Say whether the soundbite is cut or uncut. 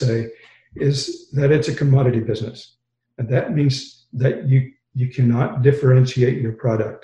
uncut